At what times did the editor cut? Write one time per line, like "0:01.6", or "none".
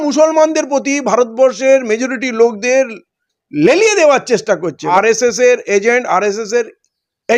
0:04.8